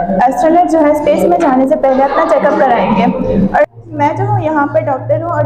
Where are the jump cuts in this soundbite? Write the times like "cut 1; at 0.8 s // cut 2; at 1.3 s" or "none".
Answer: none